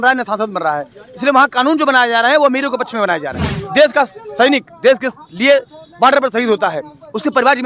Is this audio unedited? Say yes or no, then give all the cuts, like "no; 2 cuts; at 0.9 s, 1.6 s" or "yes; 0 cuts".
no; 1 cut; at 3.5 s